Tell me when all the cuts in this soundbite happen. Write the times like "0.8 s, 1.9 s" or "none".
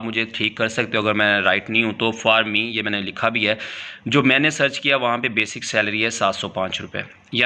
none